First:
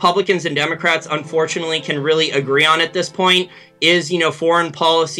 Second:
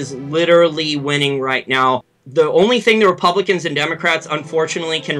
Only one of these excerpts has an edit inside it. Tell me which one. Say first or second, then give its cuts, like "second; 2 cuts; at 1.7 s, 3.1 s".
second; 1 cut; at 2.2 s